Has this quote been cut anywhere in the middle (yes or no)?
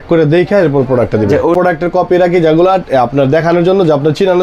yes